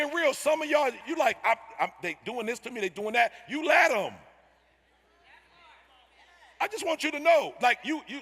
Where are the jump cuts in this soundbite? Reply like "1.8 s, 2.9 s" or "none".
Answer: 1.0 s